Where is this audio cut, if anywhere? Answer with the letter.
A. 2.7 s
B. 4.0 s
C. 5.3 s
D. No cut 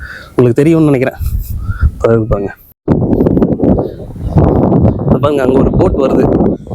A